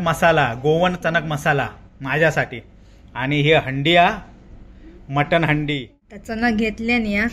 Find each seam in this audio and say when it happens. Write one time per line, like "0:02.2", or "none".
0:06.2